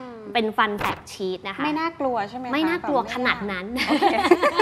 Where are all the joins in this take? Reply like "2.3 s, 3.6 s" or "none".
none